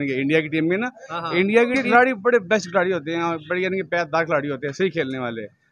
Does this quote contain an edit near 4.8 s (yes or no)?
no